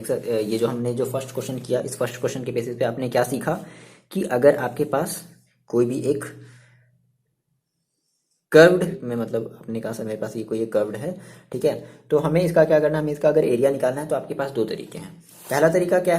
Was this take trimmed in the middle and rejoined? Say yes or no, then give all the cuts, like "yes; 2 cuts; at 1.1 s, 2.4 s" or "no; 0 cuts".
yes; 1 cut; at 9.0 s